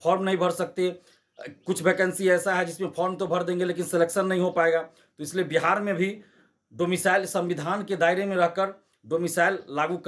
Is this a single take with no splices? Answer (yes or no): yes